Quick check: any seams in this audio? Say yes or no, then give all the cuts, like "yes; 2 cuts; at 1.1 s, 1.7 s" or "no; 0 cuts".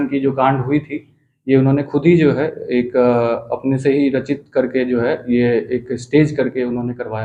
no; 0 cuts